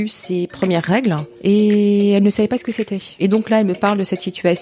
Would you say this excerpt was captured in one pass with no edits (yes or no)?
no